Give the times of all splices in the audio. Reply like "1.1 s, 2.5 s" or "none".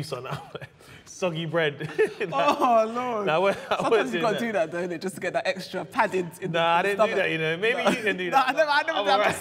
none